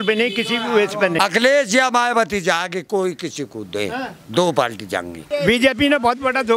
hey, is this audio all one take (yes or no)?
no